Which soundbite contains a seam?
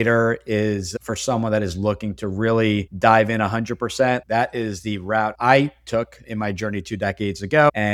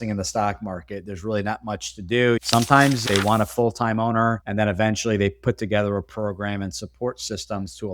second; 1 cut; at 2.4 s

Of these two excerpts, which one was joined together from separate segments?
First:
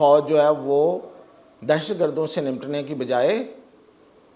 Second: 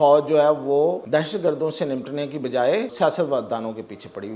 second; 2 cuts; at 1.0 s, 2.9 s

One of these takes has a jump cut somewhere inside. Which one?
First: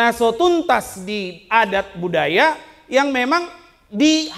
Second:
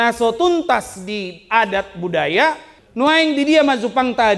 second; 1 cut; at 2.7 s

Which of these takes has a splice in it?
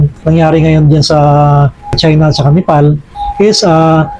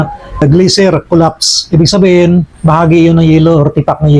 first; 1 cut; at 3.1 s

